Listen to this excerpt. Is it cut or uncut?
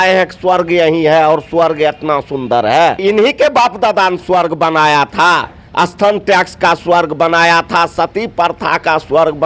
cut